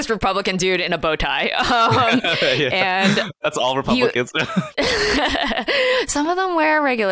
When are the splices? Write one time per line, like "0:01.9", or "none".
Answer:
0:03.5
0:04.7